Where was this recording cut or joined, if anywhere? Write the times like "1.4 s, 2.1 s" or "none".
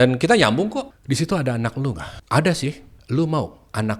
0.9 s, 2.1 s, 2.9 s